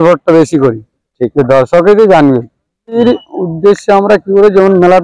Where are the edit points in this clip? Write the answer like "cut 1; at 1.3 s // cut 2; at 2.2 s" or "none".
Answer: cut 1; at 3.0 s